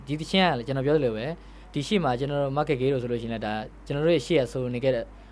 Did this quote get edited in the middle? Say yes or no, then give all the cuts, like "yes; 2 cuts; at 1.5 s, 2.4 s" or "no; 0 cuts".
no; 0 cuts